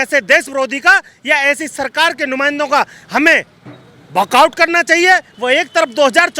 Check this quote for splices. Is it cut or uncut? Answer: cut